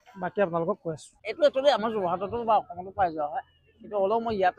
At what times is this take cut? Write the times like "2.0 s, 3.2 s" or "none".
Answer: 1.1 s